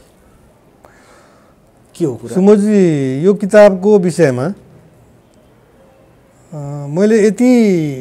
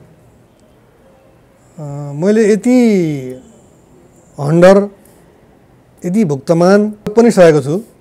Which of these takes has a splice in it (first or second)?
second